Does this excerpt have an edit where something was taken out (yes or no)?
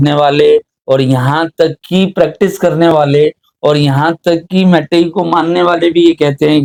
no